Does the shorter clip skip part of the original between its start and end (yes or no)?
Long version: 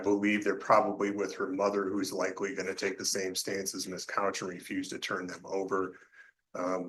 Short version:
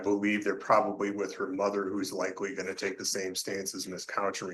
no